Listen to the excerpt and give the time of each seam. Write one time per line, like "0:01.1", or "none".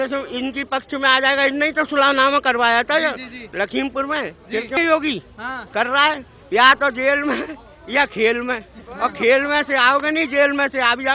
0:04.8